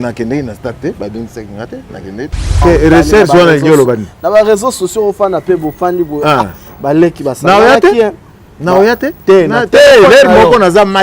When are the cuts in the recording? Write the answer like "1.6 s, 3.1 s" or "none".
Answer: 2.6 s